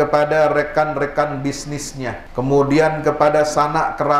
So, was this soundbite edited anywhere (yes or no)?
yes